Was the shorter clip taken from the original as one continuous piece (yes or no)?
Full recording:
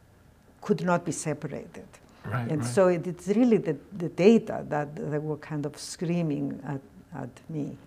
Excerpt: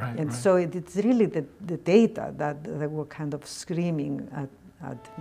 yes